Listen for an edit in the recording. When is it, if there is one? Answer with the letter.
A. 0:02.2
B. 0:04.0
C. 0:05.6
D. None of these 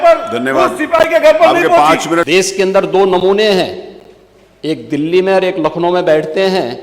A